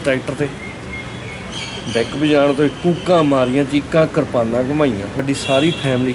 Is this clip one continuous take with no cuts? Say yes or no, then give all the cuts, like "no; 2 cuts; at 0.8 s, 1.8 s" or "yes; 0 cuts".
no; 1 cut; at 5.2 s